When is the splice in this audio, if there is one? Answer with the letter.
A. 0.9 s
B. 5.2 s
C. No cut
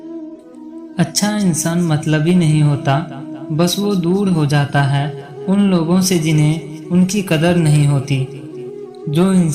A